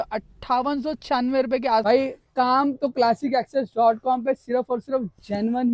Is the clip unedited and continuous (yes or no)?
no